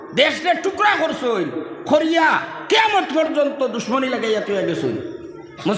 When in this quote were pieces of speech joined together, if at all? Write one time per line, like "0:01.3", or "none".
none